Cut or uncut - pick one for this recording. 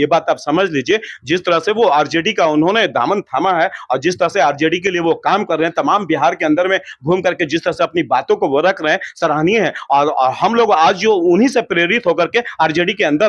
uncut